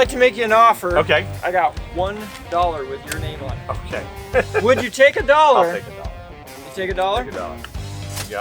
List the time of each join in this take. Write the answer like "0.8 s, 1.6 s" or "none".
1.3 s, 4.2 s